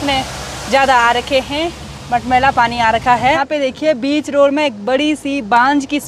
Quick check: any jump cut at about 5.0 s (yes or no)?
no